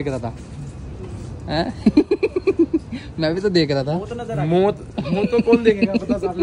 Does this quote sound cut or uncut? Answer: uncut